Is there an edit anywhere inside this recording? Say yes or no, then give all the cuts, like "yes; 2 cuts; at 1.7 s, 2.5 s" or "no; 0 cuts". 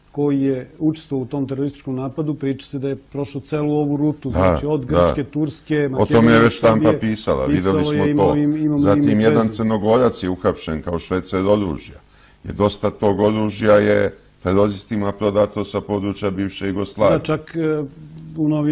yes; 1 cut; at 14.0 s